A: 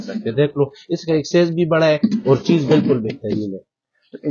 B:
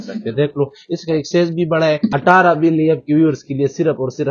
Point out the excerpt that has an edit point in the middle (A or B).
B